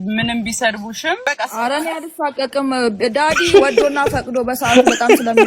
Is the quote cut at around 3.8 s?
no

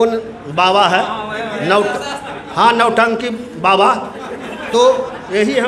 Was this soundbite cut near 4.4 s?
no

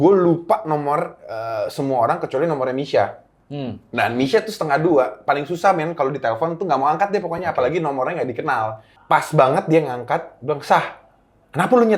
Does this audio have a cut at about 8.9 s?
yes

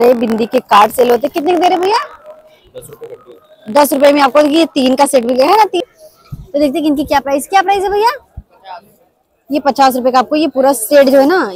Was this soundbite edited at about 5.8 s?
yes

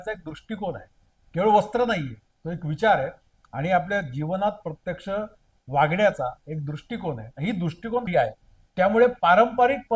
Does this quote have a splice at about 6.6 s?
no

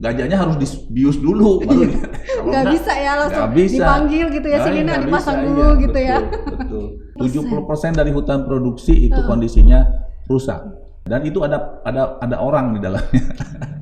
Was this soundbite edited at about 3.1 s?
no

